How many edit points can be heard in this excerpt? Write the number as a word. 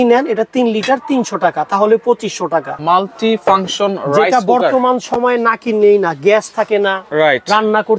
one